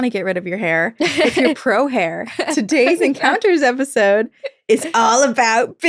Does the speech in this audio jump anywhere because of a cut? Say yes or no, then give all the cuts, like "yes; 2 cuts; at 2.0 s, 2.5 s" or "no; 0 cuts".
no; 0 cuts